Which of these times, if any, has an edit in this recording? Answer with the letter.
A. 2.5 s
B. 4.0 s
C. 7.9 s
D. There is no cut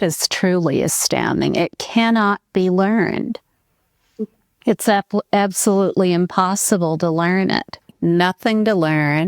C